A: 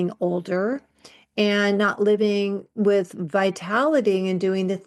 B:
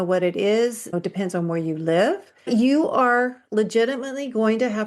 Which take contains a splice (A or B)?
B